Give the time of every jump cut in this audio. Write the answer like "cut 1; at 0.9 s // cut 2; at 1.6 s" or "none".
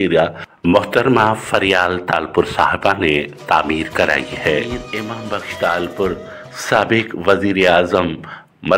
cut 1; at 4.8 s